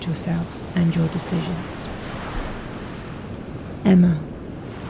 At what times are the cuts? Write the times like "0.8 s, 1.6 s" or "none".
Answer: 1.6 s, 3.2 s